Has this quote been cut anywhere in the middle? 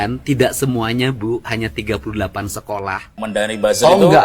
yes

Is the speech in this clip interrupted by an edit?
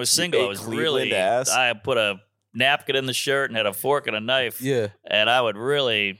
no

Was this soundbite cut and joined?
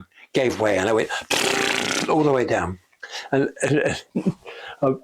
yes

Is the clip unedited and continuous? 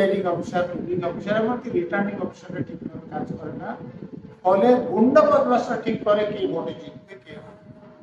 yes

